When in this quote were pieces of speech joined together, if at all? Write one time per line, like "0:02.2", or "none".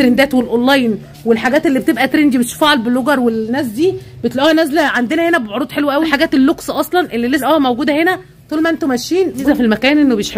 0:06.1
0:07.4
0:09.4

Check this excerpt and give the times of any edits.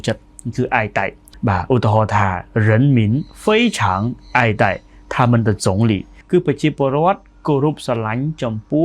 0:01.2
0:06.1

